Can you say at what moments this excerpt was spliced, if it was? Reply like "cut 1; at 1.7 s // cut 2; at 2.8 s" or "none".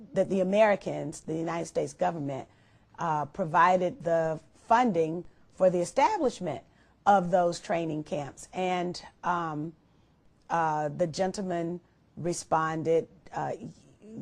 cut 1; at 2.4 s